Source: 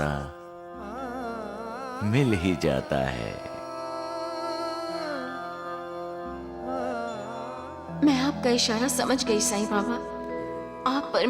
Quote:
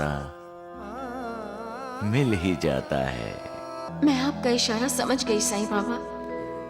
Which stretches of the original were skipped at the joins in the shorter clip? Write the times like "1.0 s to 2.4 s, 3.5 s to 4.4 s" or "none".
3.8 s to 7.8 s